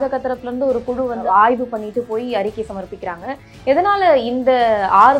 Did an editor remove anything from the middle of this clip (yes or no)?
yes